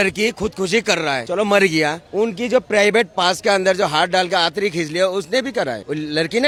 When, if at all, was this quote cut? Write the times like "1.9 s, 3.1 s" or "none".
none